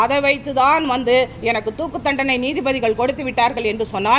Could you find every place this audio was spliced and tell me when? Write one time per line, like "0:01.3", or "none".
none